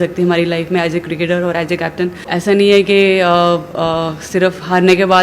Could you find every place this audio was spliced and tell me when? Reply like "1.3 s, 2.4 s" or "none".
2.3 s